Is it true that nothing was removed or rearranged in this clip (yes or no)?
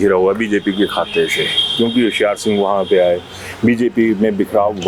yes